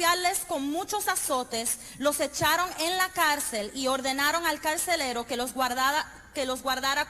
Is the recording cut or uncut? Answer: cut